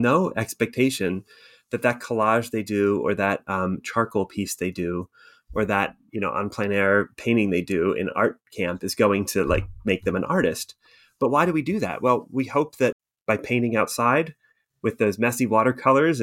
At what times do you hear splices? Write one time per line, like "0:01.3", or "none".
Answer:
0:13.0